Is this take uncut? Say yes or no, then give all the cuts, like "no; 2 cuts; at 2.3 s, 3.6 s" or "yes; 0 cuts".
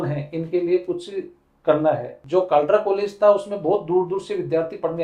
no; 1 cut; at 2.2 s